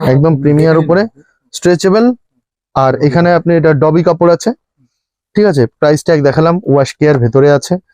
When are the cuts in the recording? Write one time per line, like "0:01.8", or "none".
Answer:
none

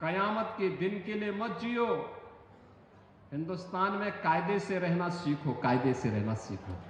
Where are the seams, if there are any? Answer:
none

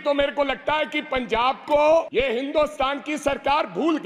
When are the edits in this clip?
0:02.1

